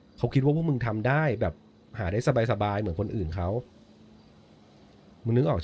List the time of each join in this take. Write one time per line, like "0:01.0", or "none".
none

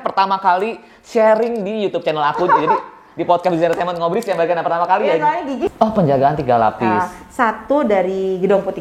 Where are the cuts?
0:05.7

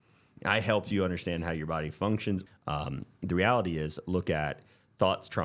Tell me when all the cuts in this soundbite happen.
0:02.4

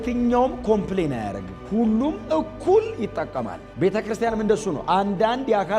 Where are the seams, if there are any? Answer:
none

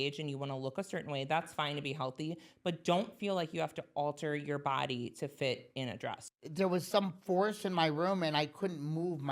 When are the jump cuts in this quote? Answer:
0:06.2

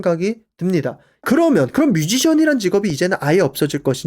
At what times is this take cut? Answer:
0:01.2

